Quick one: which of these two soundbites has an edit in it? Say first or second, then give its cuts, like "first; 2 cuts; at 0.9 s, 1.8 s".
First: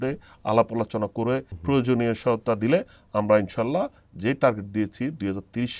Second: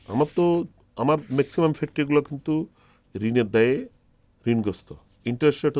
first; 1 cut; at 1.5 s